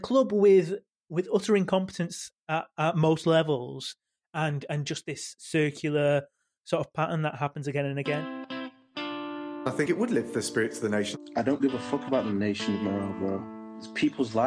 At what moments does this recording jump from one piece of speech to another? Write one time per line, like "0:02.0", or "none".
0:08.2

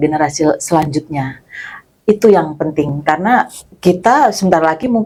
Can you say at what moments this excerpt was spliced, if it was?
none

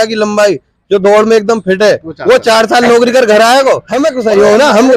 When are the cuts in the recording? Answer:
0:03.9

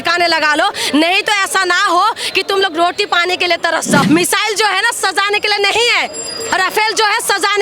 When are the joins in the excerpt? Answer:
0:04.0

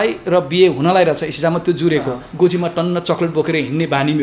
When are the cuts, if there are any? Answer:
0:02.2

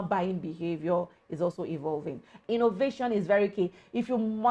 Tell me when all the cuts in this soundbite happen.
0:02.3

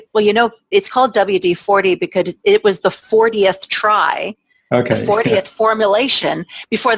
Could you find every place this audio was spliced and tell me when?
none

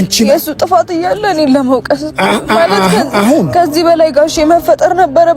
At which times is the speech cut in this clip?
none

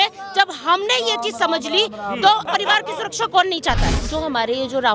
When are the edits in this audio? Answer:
0:02.4
0:03.9

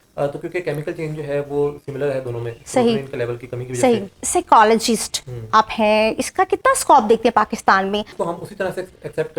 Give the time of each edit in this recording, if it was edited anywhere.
0:04.2
0:08.1

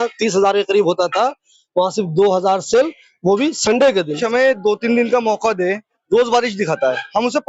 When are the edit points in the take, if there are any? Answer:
0:04.1

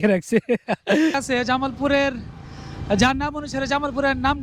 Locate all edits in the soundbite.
0:01.2

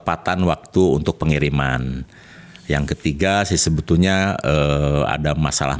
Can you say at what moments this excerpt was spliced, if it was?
none

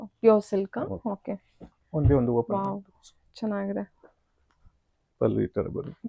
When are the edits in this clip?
none

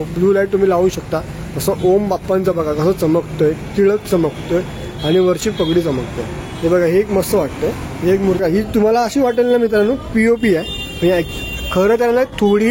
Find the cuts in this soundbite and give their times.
0:08.4

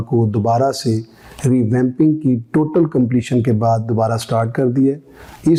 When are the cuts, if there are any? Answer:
none

